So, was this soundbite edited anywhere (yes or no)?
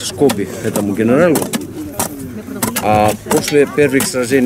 no